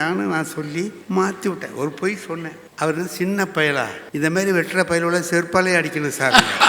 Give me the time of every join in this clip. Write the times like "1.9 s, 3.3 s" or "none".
1.0 s, 2.6 s, 4.0 s